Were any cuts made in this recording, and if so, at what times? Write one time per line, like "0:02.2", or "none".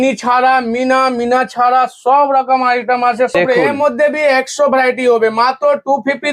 0:03.4